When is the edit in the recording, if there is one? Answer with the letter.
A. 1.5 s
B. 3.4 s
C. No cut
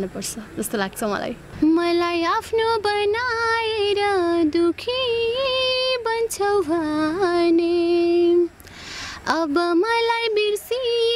A